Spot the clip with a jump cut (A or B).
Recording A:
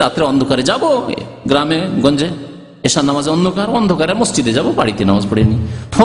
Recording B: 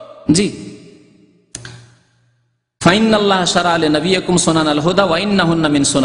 B